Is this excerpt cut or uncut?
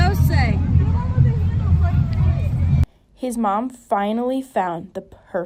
uncut